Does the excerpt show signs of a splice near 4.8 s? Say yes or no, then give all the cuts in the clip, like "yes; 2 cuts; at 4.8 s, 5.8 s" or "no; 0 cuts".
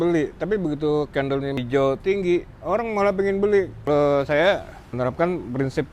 yes; 3 cuts; at 1.6 s, 3.9 s, 4.8 s